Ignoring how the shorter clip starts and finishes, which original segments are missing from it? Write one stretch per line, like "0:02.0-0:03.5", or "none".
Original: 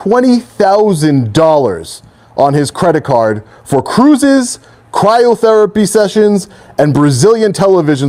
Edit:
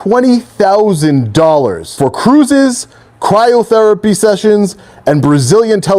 0:01.8-0:03.6